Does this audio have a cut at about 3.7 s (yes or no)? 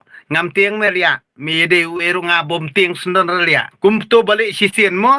yes